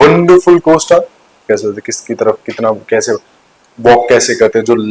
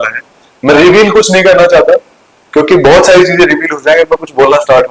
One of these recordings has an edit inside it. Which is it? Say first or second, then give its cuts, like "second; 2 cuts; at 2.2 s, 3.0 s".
first; 1 cut; at 1.3 s